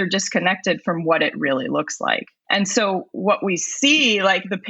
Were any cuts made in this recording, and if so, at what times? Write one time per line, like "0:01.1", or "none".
0:02.3